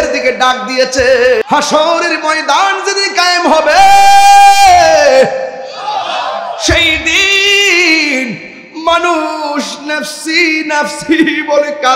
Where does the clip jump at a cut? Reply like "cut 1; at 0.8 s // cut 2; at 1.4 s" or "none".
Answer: cut 1; at 1.4 s